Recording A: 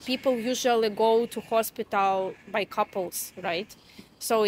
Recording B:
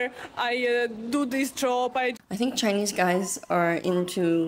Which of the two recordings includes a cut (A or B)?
B